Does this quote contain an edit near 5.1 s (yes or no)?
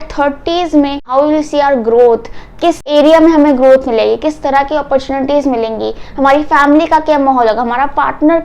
no